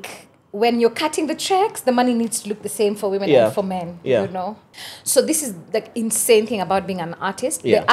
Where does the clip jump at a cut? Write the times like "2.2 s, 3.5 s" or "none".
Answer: 4.7 s